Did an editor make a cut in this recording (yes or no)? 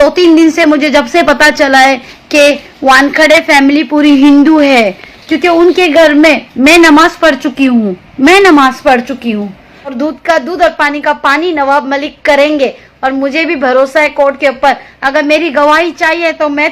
yes